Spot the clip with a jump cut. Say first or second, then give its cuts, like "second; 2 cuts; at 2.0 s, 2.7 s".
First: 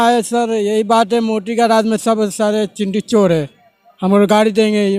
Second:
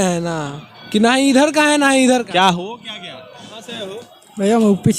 second; 1 cut; at 3.7 s